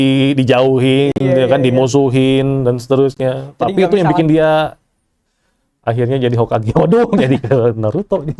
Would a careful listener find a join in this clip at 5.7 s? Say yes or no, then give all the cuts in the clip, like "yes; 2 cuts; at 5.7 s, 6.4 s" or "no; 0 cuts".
no; 0 cuts